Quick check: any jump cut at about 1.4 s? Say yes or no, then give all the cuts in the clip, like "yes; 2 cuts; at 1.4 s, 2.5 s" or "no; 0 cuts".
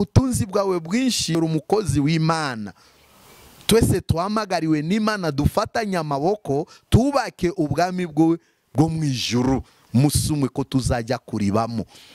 yes; 1 cut; at 1.4 s